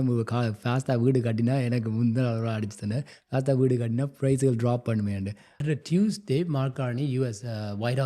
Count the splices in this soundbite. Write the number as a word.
one